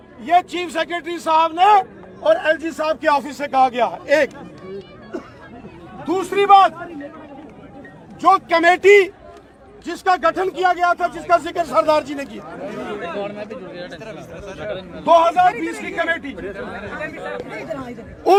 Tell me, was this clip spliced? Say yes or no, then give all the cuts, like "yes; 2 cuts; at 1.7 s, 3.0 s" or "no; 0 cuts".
no; 0 cuts